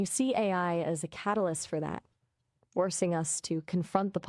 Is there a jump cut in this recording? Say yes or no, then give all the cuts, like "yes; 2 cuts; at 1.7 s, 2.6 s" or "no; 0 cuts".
no; 0 cuts